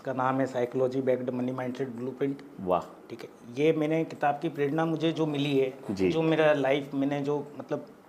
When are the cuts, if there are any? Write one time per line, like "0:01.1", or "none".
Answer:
none